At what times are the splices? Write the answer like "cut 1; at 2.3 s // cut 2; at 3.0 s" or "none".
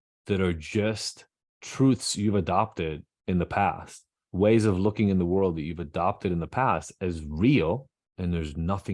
cut 1; at 8.0 s